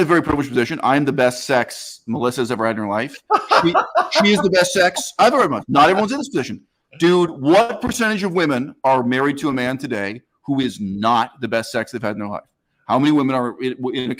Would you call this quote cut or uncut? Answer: uncut